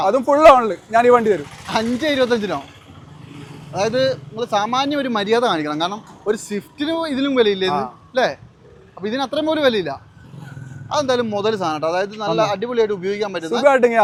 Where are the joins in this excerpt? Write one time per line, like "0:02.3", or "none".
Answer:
none